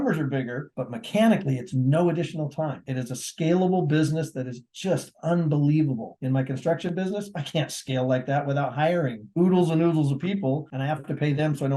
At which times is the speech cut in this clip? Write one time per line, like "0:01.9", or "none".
none